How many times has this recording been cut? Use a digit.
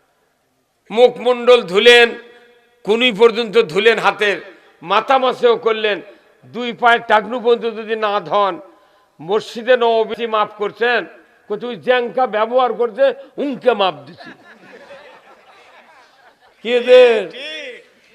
1